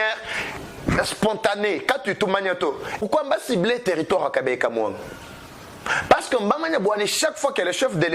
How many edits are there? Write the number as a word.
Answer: one